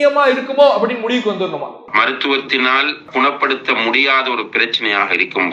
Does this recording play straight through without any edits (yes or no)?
yes